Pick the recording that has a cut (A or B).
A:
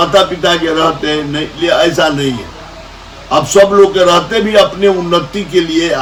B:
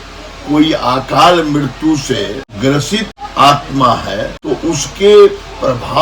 B